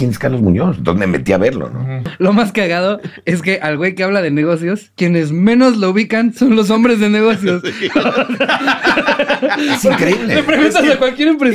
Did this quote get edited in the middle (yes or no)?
yes